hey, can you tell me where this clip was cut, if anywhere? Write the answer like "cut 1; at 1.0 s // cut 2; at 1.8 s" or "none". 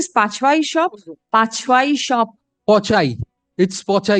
cut 1; at 1.1 s